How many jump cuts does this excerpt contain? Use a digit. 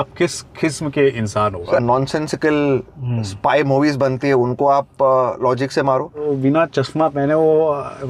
2